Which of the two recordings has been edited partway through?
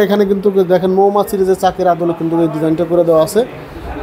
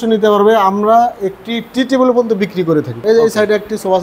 second; 1 cut; at 3.0 s

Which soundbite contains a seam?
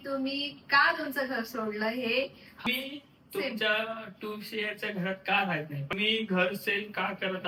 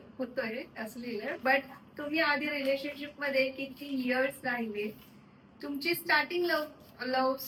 first; 2 cuts; at 2.7 s, 5.9 s

